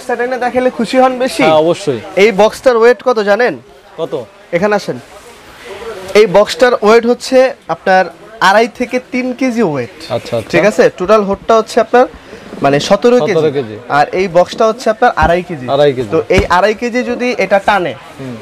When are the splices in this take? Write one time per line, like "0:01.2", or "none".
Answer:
none